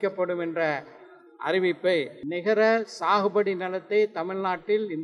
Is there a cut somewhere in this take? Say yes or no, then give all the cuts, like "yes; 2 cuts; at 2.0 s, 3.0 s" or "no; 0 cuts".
yes; 1 cut; at 2.2 s